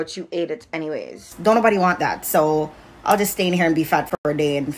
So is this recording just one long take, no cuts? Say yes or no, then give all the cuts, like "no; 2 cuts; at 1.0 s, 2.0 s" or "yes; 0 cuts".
no; 1 cut; at 1.3 s